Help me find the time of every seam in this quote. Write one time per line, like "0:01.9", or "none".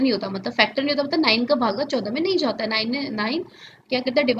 none